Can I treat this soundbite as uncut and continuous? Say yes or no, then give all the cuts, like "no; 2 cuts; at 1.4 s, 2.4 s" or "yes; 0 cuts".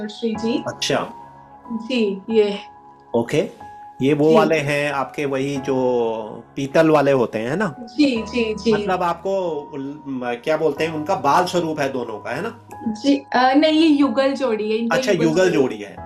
yes; 0 cuts